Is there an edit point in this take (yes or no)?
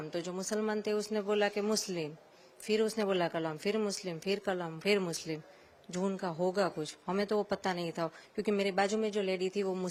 no